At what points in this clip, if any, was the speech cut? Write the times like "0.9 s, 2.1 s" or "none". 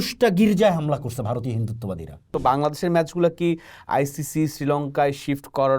2.3 s